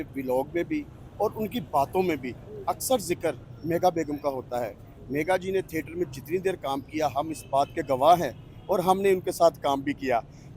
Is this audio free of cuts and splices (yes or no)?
yes